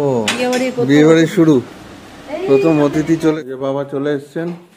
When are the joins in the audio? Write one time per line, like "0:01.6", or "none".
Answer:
0:03.3